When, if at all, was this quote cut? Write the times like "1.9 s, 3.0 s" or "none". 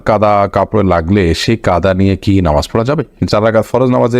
3.2 s